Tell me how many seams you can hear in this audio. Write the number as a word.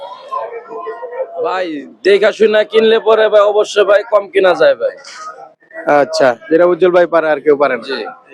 one